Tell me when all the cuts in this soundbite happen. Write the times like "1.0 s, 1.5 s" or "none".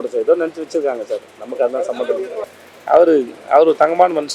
2.5 s